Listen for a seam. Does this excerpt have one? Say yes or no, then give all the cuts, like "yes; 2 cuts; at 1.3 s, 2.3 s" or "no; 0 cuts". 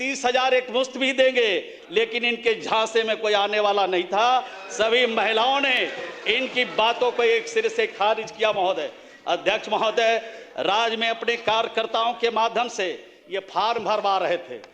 no; 0 cuts